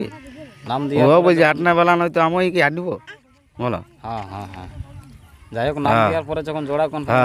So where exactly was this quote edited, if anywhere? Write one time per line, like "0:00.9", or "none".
none